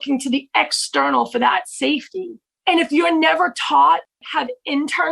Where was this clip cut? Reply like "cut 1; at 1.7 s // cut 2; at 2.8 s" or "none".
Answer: cut 1; at 2.4 s // cut 2; at 4.1 s